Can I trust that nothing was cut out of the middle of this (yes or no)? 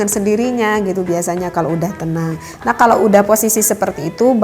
yes